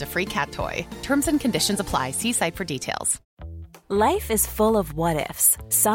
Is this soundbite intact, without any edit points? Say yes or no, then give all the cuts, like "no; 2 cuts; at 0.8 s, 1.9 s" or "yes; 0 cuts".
no; 1 cut; at 3.2 s